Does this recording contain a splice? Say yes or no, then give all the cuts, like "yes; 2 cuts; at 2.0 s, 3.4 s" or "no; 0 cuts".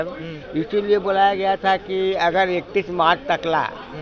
no; 0 cuts